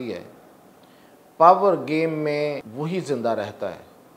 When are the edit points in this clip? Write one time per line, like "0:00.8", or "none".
0:02.7